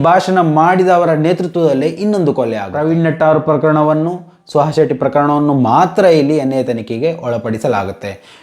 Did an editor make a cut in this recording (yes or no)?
yes